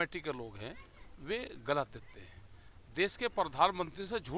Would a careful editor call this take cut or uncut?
uncut